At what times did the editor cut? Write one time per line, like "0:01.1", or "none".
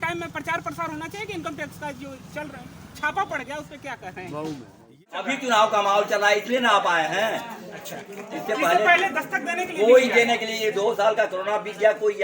0:05.3